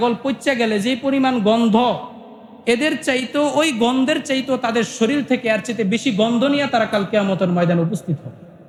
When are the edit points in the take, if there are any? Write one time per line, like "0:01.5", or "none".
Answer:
none